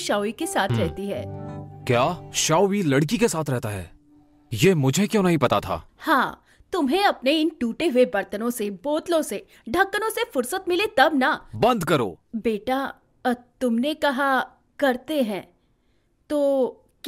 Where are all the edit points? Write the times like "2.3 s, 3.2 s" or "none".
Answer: 2.3 s, 12.2 s